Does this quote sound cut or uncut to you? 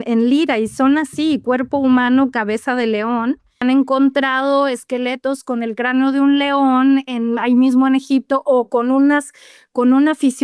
cut